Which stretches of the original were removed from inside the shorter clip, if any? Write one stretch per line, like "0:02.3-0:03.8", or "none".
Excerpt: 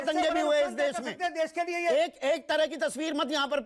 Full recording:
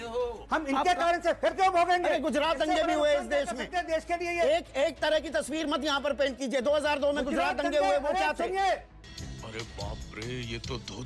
none

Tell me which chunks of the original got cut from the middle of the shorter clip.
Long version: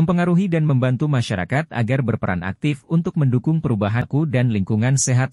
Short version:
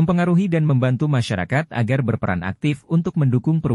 none

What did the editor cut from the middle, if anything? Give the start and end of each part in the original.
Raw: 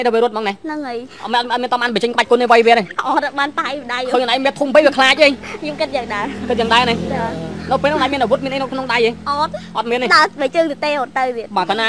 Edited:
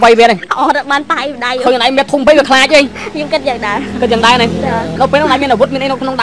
0:07.4-0:07.6

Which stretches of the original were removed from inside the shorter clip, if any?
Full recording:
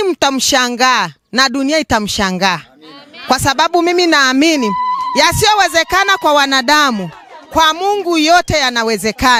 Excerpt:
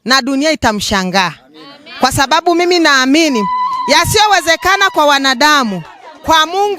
none

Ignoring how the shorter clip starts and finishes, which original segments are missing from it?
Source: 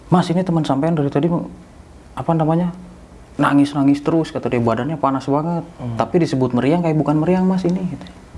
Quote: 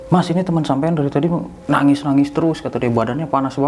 0:01.5-0:03.2

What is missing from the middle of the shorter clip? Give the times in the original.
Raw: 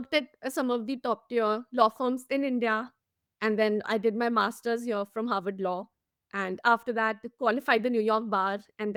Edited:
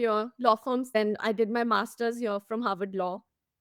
0:02.3-0:03.6

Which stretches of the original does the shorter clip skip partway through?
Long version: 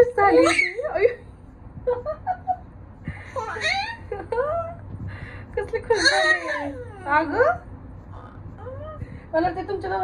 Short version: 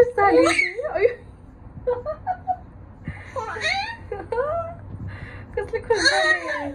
none

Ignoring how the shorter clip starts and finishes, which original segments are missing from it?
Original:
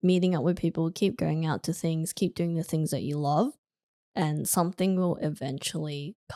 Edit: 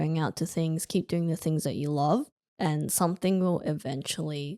0:03.7-0:04.0

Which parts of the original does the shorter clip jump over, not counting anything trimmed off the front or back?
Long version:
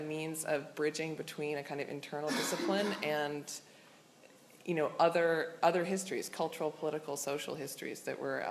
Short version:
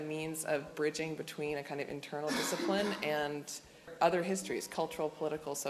0:03.9-0:05.5

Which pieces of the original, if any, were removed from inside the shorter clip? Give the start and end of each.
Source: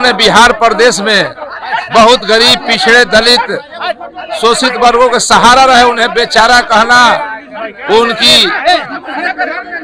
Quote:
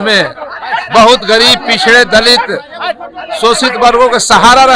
none

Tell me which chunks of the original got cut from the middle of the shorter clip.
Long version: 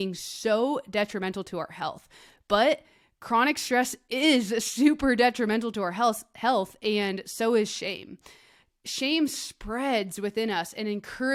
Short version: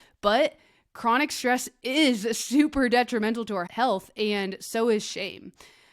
0:05.9-0:06.3

